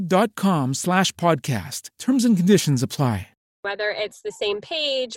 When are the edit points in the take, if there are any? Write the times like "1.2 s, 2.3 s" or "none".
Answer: 3.6 s